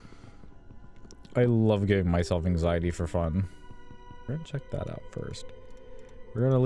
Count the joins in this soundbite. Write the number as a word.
one